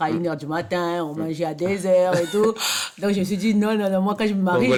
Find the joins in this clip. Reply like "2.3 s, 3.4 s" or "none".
none